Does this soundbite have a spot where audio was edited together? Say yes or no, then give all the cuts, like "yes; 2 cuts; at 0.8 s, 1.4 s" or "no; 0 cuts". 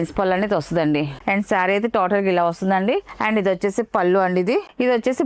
yes; 1 cut; at 1.1 s